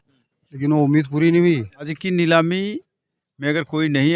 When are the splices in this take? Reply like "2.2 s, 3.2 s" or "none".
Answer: 2.0 s